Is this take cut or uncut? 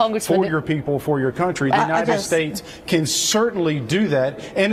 uncut